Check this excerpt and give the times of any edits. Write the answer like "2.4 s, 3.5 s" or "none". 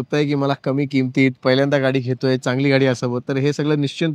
none